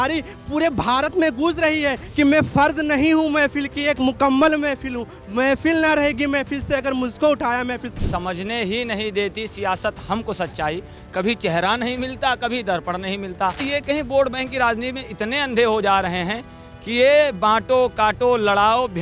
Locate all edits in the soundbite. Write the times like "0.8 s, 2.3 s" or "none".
2.0 s, 8.0 s, 13.6 s